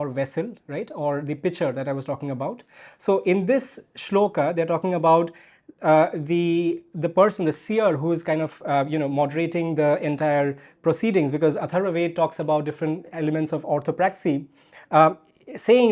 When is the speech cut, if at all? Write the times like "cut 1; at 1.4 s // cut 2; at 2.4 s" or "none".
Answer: none